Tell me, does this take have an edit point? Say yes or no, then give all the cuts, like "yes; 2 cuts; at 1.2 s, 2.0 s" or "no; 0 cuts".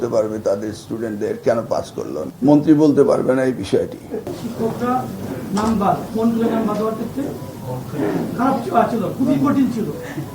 yes; 2 cuts; at 2.2 s, 4.4 s